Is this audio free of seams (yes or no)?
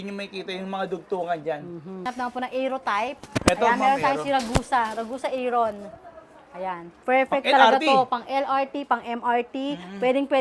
no